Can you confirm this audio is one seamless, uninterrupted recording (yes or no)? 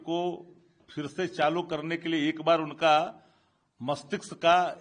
yes